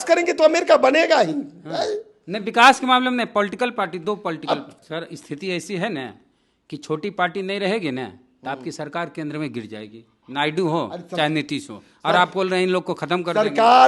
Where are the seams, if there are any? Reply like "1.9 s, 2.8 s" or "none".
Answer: 4.8 s